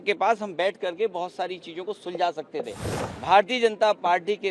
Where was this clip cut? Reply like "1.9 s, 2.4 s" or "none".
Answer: 2.8 s